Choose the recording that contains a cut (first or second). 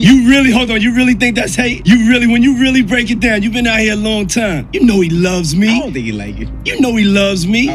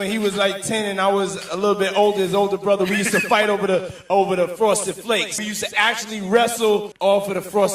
second